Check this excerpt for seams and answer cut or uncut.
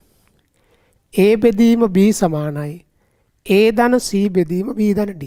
uncut